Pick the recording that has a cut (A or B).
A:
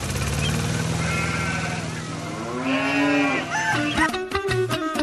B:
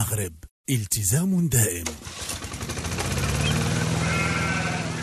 B